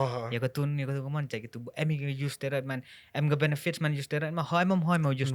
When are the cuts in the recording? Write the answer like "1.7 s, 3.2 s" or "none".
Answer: none